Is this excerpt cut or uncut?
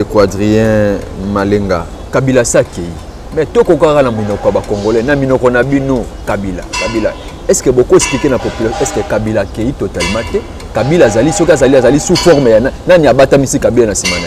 uncut